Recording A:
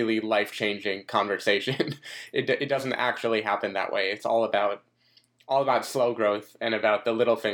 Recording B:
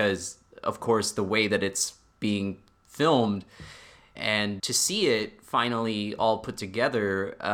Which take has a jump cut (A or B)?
B